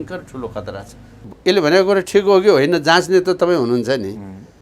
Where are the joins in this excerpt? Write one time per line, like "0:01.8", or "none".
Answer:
0:01.2